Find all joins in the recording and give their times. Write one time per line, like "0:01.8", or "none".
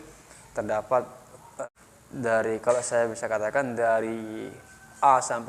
0:01.5